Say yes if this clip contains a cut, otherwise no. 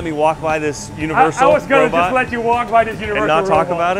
no